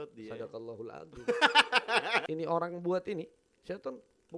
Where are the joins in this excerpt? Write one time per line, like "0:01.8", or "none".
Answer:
0:02.2